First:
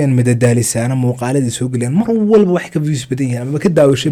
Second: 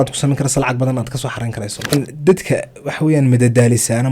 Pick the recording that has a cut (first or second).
second